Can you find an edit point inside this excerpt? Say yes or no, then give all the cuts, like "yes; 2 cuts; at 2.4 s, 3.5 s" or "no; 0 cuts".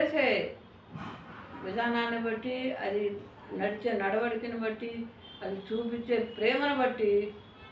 no; 0 cuts